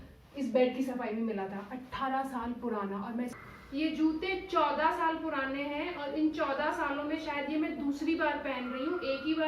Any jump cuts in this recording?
yes; 1 cut; at 3.4 s

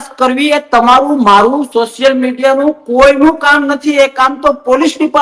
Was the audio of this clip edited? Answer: no; 0 cuts

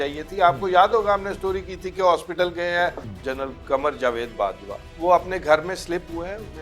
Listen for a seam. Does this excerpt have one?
yes; 2 cuts; at 3.1 s, 4.9 s

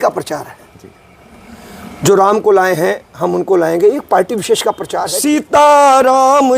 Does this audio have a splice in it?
yes; 1 cut; at 4.9 s

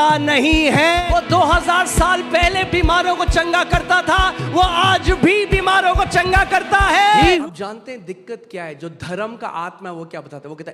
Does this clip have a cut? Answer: yes; 2 cuts; at 1.0 s, 7.4 s

